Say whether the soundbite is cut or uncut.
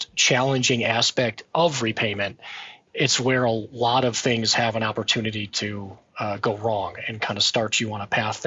cut